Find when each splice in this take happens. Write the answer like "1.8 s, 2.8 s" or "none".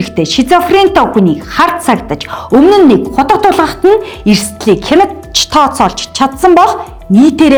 none